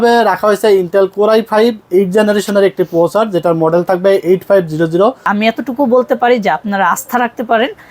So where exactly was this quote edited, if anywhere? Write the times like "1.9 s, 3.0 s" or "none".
5.3 s